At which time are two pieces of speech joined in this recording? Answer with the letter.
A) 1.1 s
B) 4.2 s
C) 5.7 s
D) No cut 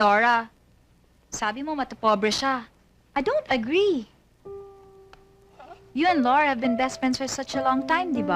B